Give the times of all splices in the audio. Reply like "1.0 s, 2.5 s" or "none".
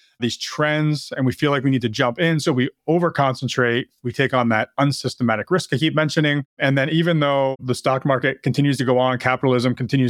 6.5 s, 7.6 s